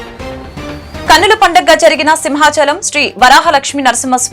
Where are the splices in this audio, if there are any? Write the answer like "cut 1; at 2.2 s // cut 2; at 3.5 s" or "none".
cut 1; at 1.1 s